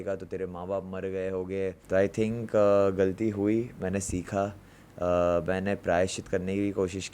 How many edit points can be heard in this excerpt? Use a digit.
1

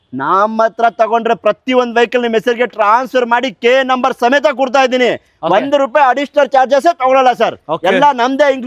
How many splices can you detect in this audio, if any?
0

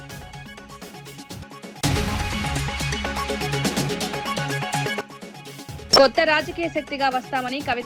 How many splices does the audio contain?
3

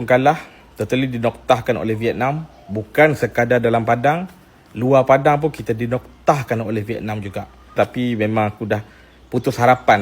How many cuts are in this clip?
1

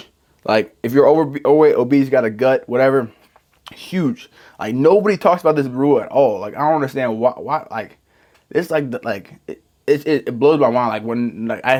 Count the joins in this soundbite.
0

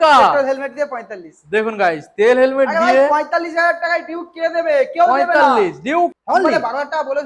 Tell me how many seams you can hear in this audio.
1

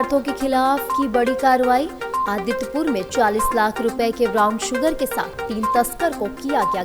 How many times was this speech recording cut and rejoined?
0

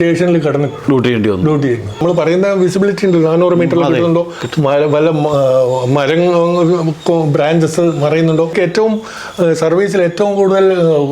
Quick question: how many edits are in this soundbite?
2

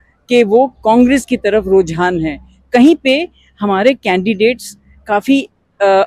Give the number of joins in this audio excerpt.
0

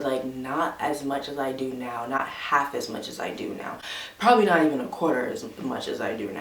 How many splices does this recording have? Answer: 0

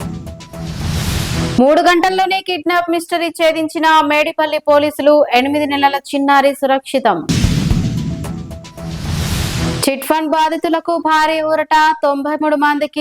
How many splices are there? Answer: 1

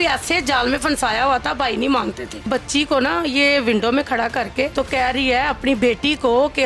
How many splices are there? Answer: 2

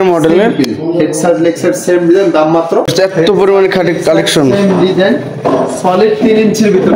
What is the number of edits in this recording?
1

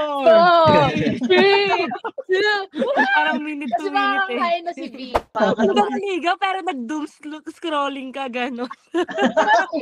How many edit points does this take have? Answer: 1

